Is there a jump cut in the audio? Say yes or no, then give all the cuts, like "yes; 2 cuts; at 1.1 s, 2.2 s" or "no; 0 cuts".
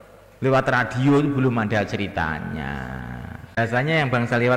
yes; 1 cut; at 3.6 s